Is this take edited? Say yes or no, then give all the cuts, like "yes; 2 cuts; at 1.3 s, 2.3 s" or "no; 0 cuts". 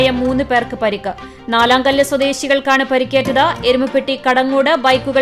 no; 0 cuts